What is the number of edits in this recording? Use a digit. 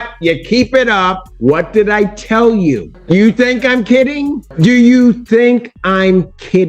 3